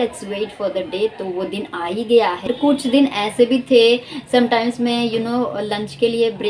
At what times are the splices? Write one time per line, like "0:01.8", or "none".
0:02.5